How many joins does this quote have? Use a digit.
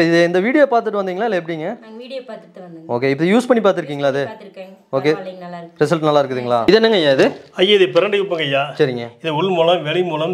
1